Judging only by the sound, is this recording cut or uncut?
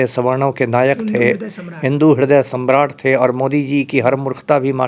uncut